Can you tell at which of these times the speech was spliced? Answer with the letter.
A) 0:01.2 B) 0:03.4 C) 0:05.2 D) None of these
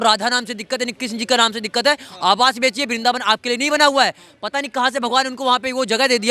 D